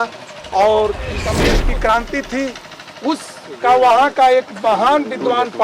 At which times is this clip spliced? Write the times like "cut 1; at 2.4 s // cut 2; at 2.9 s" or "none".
cut 1; at 1.3 s